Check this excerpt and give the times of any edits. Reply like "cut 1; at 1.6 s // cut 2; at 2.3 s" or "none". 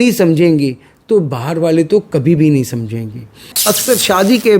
cut 1; at 3.5 s

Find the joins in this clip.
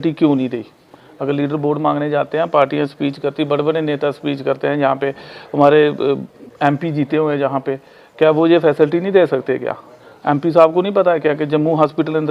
none

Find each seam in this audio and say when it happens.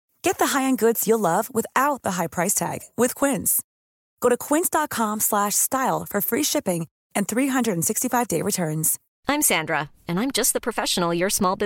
cut 1; at 9.0 s

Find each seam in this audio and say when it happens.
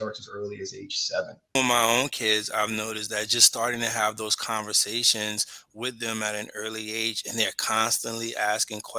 cut 1; at 1.5 s

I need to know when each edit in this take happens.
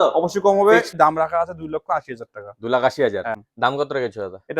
cut 1; at 0.9 s // cut 2; at 3.5 s

